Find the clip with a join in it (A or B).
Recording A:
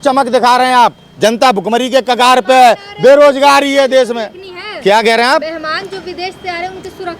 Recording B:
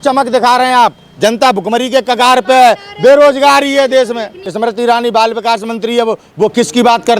B